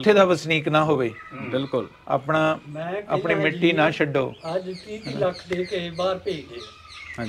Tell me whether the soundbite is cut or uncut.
uncut